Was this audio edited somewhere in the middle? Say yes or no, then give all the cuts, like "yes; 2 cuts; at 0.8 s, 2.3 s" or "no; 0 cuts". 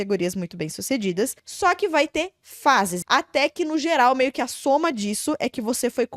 yes; 2 cuts; at 1.4 s, 3.0 s